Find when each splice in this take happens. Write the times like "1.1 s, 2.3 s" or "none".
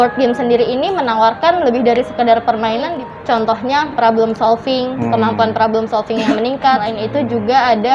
3.0 s, 6.9 s